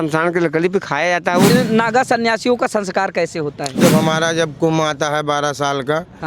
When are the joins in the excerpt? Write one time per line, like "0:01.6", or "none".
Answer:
0:01.5
0:03.8